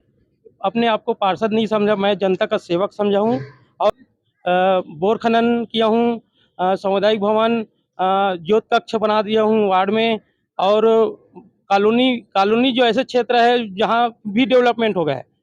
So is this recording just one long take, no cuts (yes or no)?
no